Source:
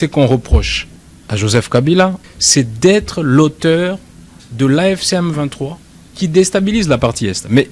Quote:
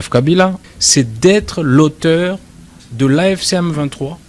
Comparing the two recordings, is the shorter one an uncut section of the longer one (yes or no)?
yes